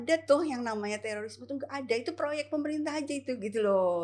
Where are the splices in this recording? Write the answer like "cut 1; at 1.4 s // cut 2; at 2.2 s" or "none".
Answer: none